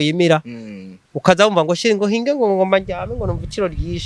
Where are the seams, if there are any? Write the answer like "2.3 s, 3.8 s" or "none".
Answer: none